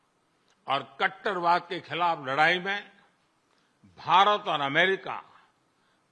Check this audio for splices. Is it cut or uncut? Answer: uncut